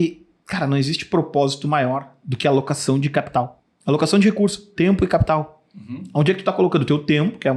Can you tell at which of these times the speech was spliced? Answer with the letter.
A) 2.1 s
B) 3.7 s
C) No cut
B